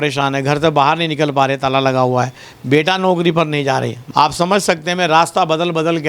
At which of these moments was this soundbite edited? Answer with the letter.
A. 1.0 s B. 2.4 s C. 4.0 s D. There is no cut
C